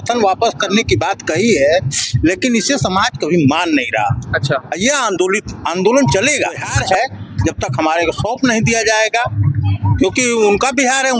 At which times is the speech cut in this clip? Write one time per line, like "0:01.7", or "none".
0:06.7